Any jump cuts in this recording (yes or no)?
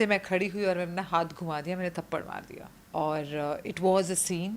no